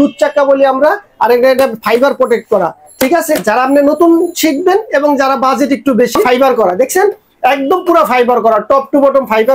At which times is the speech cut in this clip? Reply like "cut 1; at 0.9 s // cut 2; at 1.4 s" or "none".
cut 1; at 6.2 s